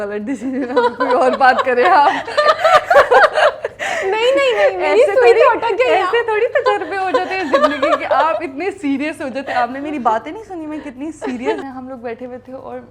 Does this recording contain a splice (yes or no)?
yes